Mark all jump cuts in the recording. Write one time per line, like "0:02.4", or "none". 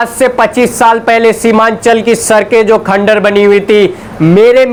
none